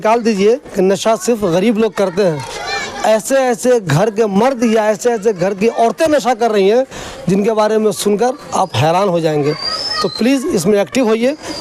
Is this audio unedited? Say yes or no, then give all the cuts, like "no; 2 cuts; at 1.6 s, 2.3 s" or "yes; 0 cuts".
yes; 0 cuts